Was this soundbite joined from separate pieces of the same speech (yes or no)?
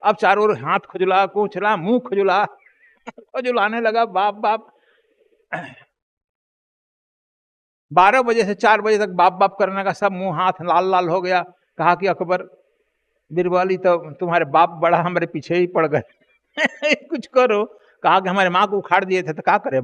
no